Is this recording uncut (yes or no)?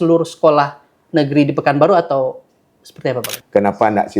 no